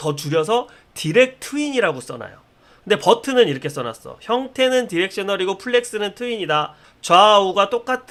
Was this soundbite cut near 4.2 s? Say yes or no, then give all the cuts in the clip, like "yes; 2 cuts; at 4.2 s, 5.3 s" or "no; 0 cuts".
no; 0 cuts